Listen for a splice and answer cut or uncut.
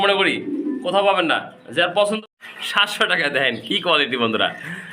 cut